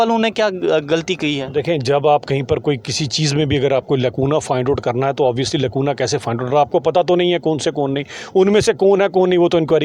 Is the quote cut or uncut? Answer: uncut